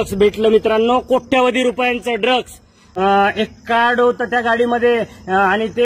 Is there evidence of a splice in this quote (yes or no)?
yes